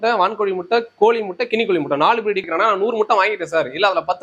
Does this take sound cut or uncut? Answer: cut